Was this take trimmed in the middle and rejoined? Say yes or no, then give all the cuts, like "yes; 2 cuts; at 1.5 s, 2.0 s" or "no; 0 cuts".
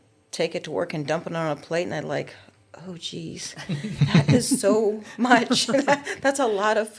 no; 0 cuts